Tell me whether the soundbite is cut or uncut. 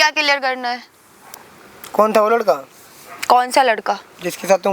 uncut